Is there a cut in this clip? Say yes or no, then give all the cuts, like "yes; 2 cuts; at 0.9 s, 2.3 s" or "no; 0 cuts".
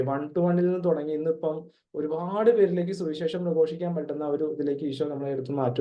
no; 0 cuts